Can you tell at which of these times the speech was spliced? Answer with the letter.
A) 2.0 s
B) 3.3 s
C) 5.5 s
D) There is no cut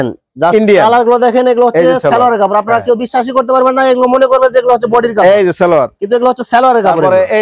D